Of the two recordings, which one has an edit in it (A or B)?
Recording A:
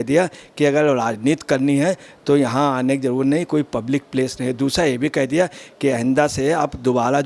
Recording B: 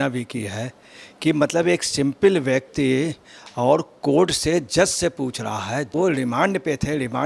B